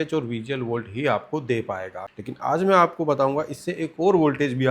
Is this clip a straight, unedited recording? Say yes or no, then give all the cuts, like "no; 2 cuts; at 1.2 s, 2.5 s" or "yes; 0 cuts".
no; 1 cut; at 2.0 s